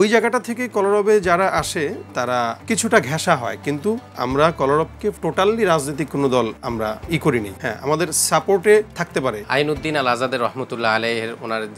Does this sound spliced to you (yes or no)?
yes